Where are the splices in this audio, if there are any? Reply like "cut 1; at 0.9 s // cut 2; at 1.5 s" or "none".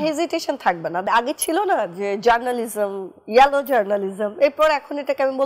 cut 1; at 1.1 s

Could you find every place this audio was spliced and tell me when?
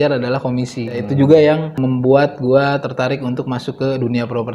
cut 1; at 1.0 s // cut 2; at 1.8 s

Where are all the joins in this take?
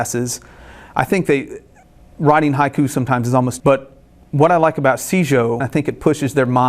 cut 1; at 5.6 s

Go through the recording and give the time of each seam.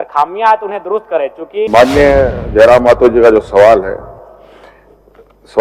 cut 1; at 1.7 s

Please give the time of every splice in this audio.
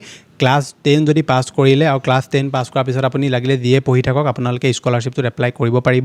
none

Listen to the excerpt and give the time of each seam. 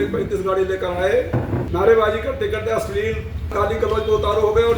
cut 1; at 1.6 s // cut 2; at 3.5 s

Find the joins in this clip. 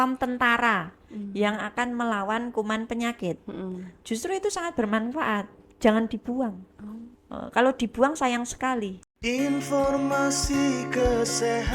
cut 1; at 9.0 s

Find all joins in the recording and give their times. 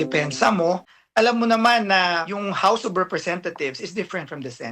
cut 1; at 0.9 s // cut 2; at 2.3 s

